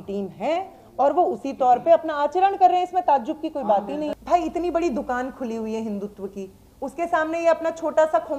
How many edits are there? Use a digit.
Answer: 1